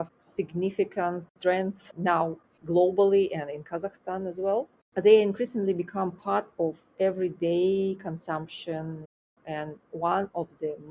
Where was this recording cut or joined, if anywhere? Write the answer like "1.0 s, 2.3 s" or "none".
9.3 s